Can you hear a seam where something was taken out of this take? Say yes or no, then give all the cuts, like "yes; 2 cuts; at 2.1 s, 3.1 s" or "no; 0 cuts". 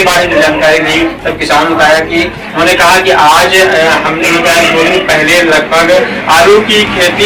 no; 0 cuts